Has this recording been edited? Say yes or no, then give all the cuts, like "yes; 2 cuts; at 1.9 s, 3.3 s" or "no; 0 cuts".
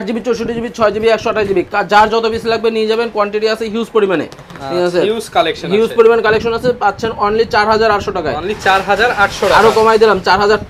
no; 0 cuts